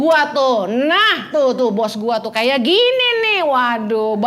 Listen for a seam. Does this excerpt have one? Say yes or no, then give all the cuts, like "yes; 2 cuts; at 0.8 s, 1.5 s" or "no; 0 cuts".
no; 0 cuts